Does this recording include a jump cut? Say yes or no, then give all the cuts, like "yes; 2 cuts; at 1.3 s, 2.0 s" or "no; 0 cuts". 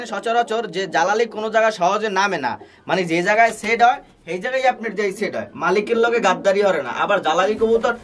no; 0 cuts